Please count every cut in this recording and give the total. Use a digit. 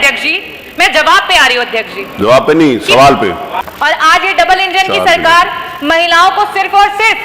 1